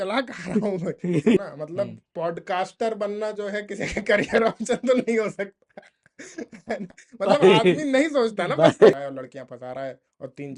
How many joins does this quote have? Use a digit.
2